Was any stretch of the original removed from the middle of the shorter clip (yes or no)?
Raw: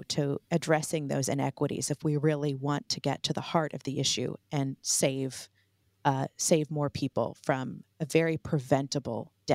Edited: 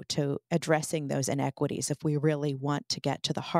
no